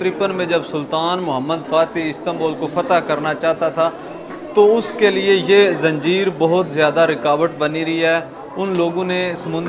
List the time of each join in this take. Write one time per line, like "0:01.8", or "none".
none